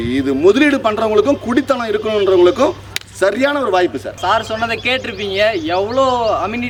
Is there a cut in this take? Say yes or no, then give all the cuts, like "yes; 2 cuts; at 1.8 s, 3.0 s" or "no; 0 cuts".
no; 0 cuts